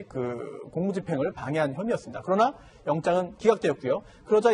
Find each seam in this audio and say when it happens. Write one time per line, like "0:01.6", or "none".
0:01.1